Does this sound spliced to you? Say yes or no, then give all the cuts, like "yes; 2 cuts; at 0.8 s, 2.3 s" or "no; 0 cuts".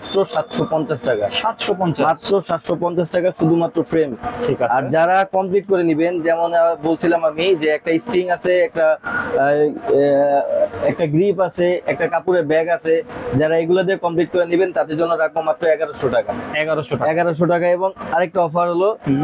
no; 0 cuts